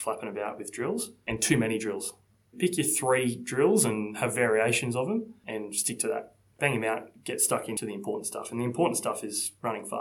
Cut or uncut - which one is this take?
cut